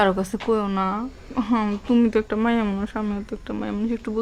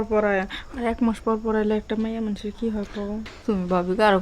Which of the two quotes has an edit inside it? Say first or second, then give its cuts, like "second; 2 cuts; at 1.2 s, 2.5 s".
second; 1 cut; at 3.1 s